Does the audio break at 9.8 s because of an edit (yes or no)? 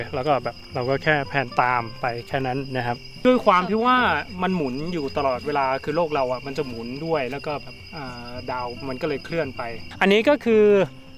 yes